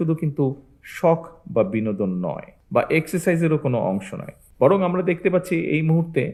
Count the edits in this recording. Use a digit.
0